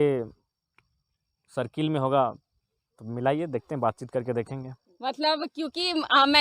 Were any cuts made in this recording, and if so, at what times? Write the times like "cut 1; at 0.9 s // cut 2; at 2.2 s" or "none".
none